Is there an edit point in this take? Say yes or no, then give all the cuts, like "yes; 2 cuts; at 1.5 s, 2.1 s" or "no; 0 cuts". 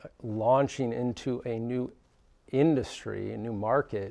no; 0 cuts